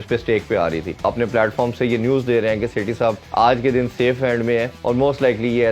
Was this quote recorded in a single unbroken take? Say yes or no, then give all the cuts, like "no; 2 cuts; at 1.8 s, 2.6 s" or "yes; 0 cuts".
no; 3 cuts; at 1.0 s, 3.2 s, 4.7 s